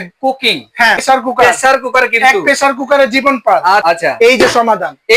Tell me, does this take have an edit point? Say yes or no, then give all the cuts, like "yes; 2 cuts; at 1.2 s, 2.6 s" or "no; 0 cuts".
yes; 2 cuts; at 1.0 s, 3.8 s